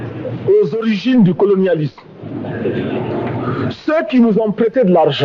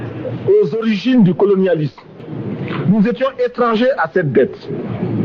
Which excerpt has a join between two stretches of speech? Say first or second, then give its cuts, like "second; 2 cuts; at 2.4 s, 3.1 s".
second; 1 cut; at 2.2 s